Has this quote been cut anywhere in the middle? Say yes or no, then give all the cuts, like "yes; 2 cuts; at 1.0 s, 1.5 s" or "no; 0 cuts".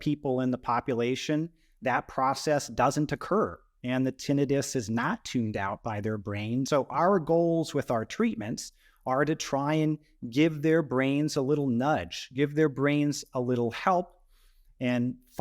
yes; 1 cut; at 6.7 s